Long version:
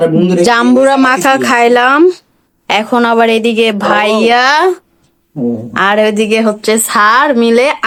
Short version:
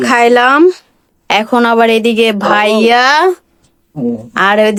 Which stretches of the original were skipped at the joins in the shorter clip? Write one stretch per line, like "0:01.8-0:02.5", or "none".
none